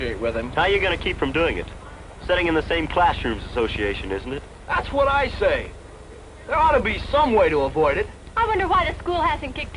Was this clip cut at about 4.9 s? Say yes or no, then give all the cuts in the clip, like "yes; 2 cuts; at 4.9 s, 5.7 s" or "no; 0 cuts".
yes; 1 cut; at 4.9 s